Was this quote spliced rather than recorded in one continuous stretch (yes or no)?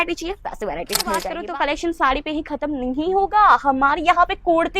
yes